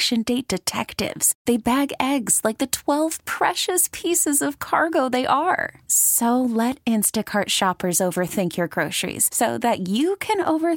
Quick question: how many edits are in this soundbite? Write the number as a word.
zero